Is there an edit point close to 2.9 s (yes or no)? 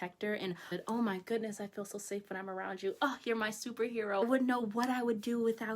no